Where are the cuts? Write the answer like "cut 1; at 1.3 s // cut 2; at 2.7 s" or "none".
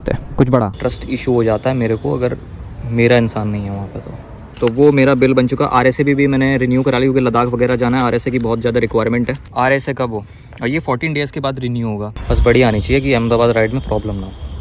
cut 1; at 0.7 s // cut 2; at 4.5 s // cut 3; at 9.4 s // cut 4; at 12.1 s